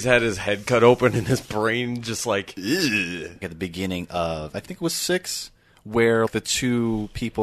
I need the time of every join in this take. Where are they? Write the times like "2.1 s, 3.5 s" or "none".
3.5 s, 6.3 s